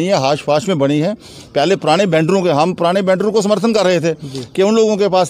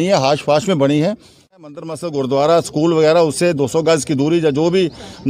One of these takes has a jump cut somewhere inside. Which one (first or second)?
second